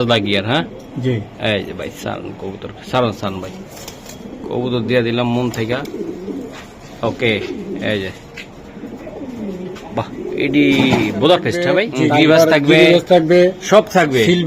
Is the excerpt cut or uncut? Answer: cut